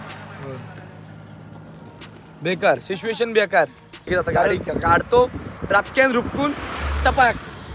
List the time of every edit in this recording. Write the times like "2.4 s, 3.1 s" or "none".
4.3 s